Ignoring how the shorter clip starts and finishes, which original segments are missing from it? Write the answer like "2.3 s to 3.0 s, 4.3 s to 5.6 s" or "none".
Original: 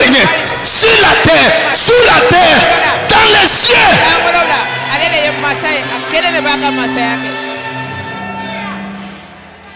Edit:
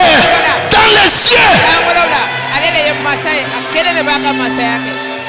none